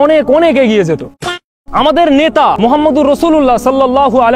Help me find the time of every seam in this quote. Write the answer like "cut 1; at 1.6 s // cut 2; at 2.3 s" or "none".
cut 1; at 1.5 s